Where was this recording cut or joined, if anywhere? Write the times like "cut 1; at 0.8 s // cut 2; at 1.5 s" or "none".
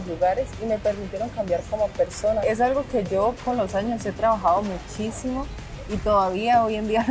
cut 1; at 2.4 s